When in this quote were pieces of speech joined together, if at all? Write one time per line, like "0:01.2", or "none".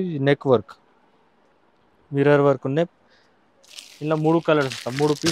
none